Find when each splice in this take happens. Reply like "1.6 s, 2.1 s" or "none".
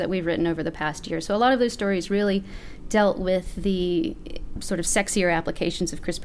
none